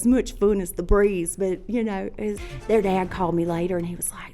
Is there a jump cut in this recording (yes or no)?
yes